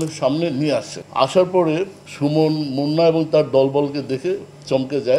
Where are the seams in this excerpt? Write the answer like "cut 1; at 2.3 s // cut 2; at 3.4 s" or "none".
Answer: cut 1; at 1.0 s // cut 2; at 2.0 s